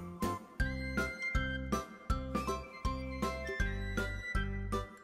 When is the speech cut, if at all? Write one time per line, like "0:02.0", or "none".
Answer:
none